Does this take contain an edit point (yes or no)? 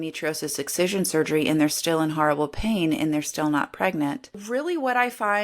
yes